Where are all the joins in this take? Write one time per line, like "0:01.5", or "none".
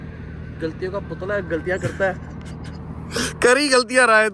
none